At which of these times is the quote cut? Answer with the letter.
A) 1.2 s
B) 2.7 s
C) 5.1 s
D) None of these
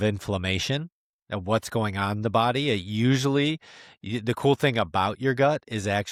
D